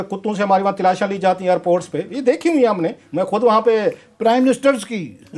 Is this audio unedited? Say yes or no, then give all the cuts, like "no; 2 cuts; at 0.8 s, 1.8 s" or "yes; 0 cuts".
yes; 0 cuts